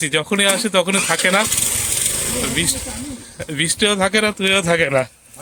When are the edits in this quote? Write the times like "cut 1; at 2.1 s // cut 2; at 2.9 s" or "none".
none